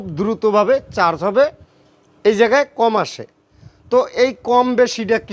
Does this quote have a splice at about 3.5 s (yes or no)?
no